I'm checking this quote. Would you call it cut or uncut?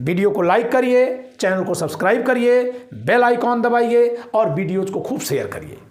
uncut